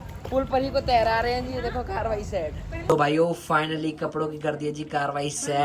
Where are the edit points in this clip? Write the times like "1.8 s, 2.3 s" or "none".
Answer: 2.7 s

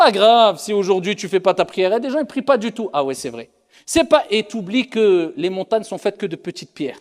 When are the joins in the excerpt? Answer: none

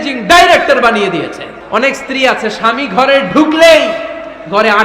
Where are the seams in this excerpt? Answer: 1.5 s

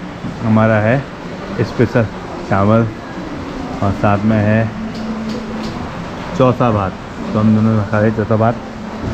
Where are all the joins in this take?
none

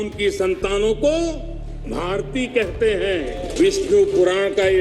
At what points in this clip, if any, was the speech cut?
3.5 s

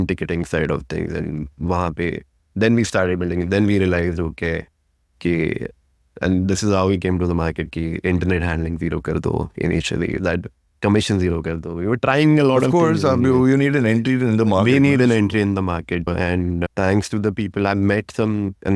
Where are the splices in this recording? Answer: none

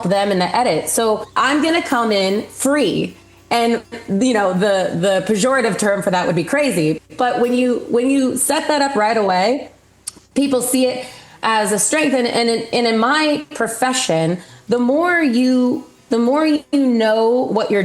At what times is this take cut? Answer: 1.3 s

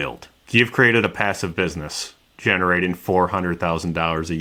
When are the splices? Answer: none

